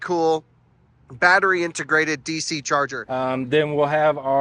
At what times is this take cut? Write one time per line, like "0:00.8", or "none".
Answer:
0:03.0